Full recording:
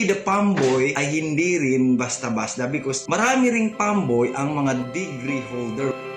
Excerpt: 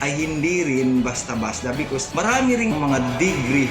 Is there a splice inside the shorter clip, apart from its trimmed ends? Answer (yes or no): yes